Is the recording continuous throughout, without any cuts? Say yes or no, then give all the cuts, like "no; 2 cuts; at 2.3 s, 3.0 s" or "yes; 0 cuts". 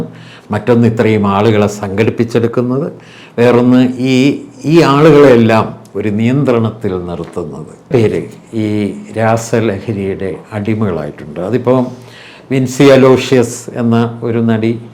no; 1 cut; at 7.9 s